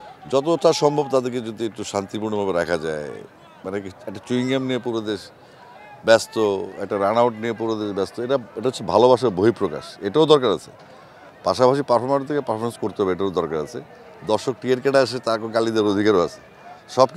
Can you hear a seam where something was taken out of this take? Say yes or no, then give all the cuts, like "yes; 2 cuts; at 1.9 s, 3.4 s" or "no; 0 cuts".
no; 0 cuts